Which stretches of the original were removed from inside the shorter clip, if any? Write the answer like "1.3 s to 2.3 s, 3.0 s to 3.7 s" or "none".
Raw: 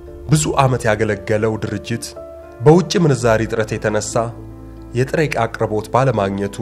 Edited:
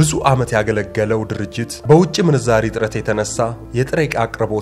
2.0 s to 2.4 s, 4.4 s to 4.8 s